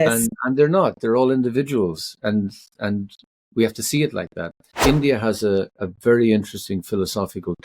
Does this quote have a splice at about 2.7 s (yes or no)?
no